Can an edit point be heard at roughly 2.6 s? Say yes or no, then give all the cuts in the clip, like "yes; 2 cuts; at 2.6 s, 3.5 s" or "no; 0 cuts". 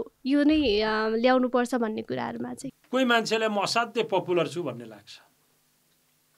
yes; 1 cut; at 2.6 s